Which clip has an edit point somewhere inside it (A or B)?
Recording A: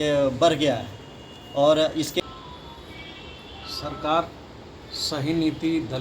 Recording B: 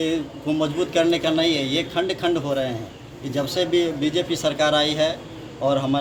A